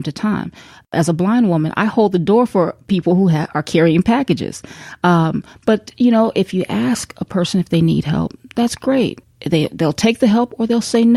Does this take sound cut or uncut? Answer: cut